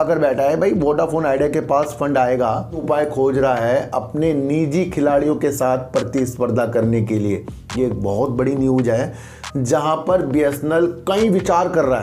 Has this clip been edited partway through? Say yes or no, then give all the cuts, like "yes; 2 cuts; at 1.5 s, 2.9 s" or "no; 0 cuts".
yes; 1 cut; at 2.8 s